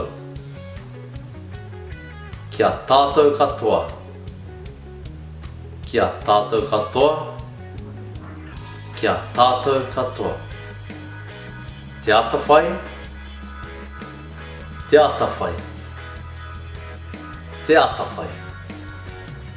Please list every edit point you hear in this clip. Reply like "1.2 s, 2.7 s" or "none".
4.0 s, 5.9 s, 7.4 s, 9.0 s, 10.4 s, 12.0 s